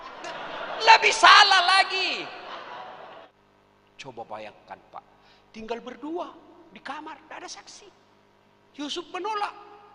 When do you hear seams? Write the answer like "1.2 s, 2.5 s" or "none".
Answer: 3.3 s